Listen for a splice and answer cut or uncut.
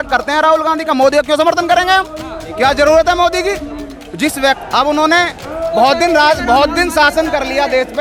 uncut